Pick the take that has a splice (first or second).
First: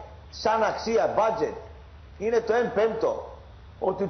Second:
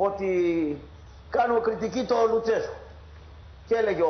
first